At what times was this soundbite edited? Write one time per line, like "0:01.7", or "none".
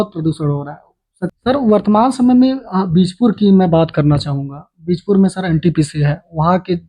0:01.3